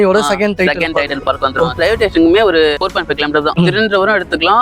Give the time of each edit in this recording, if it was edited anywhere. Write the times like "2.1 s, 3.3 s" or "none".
1.7 s, 3.5 s